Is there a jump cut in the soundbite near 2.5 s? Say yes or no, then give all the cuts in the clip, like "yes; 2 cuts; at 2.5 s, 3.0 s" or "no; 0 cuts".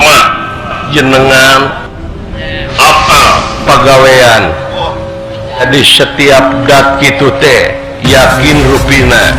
no; 1 cut; at 5.6 s